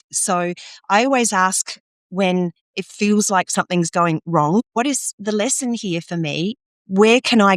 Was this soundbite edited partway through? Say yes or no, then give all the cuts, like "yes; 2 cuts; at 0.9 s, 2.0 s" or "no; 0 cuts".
yes; 1 cut; at 4.6 s